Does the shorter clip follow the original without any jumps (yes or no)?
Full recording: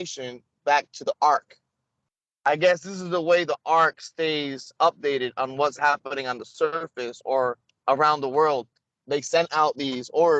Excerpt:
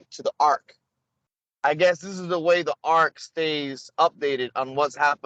yes